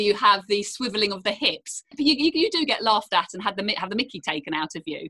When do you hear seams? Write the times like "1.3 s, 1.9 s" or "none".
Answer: 1.9 s